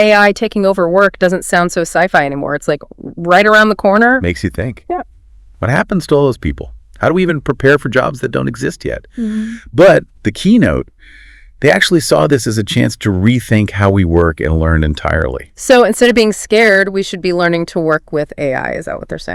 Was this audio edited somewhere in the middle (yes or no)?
no